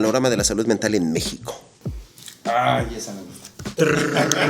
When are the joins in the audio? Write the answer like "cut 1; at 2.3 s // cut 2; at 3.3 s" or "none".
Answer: none